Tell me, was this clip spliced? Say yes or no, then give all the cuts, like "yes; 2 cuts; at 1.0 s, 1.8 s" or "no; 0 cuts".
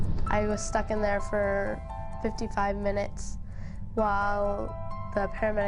no; 0 cuts